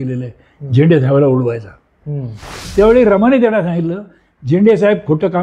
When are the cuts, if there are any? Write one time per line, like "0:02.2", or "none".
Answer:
0:02.7